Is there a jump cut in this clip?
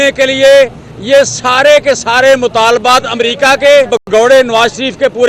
yes; 1 cut; at 4.0 s

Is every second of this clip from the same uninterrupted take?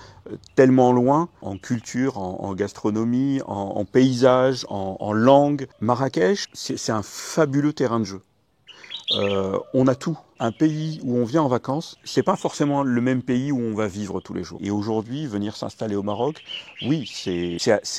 no; 3 cuts; at 5.7 s, 10.4 s, 14.5 s

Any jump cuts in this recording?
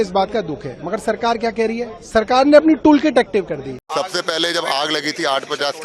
yes; 1 cut; at 3.8 s

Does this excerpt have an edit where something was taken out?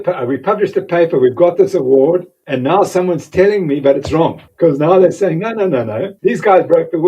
yes; 3 cuts; at 2.4 s, 4.4 s, 6.1 s

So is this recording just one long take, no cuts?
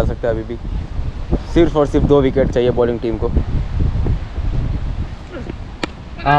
yes; 0 cuts

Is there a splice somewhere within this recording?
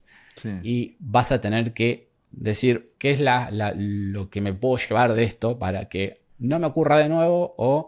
yes; 2 cuts; at 2.5 s, 6.2 s

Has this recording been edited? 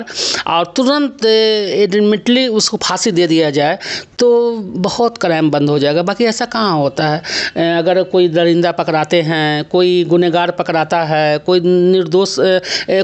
no; 0 cuts

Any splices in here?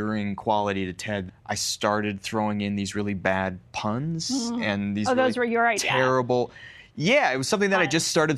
yes; 1 cut; at 1.2 s

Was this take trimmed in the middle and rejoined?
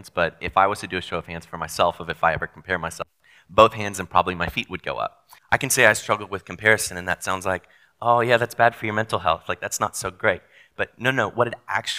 yes; 1 cut; at 5.3 s

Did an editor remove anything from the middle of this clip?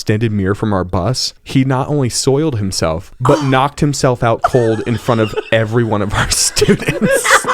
yes; 2 cuts; at 1.3 s, 3.1 s

